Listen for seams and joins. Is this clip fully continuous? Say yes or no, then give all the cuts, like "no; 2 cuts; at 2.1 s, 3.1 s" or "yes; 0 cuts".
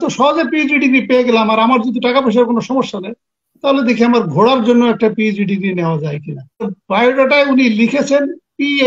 no; 1 cut; at 6.8 s